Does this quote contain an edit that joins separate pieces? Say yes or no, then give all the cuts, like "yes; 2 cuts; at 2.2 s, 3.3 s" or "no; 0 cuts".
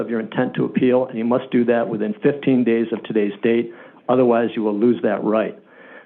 no; 0 cuts